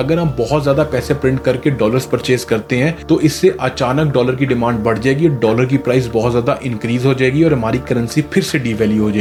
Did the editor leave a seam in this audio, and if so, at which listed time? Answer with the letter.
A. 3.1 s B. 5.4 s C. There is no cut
C